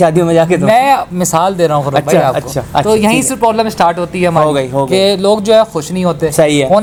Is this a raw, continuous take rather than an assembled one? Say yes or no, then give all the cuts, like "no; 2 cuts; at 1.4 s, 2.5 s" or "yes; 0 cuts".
yes; 0 cuts